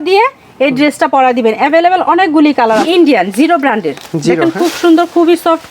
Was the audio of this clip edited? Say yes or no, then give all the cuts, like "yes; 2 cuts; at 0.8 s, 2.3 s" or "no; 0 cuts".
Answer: yes; 1 cut; at 2.9 s